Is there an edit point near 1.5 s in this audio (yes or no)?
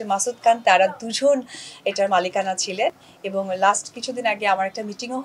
no